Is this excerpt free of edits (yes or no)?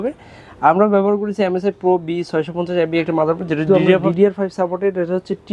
no